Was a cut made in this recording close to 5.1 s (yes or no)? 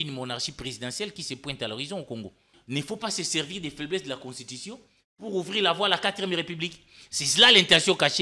no